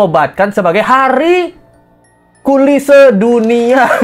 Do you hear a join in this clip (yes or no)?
no